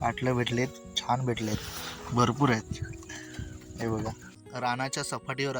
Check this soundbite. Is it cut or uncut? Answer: cut